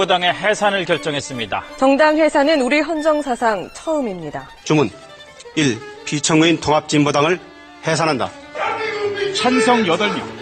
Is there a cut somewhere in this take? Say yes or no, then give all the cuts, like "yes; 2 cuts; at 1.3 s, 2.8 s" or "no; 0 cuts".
no; 0 cuts